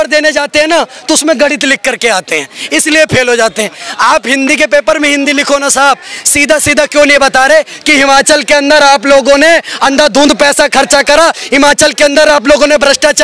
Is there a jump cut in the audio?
no; 0 cuts

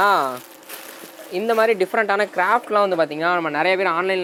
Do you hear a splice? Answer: no; 0 cuts

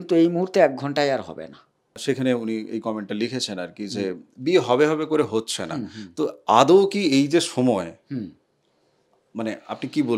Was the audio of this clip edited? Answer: yes; 1 cut; at 1.9 s

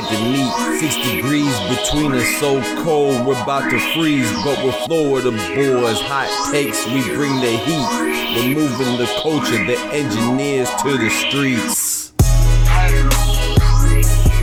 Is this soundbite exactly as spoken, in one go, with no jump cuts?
yes; 0 cuts

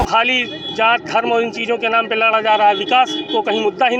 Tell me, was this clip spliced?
no; 0 cuts

